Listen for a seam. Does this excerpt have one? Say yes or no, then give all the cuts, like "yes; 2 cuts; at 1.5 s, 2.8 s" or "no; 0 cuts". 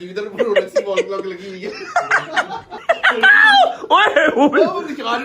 yes; 1 cut; at 2.7 s